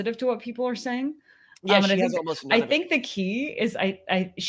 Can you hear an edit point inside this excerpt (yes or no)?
no